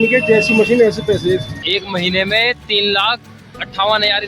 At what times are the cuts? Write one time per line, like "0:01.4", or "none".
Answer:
0:01.6